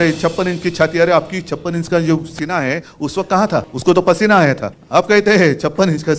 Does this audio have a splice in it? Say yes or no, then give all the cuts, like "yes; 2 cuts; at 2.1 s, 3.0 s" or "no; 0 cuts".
yes; 2 cuts; at 3.7 s, 4.7 s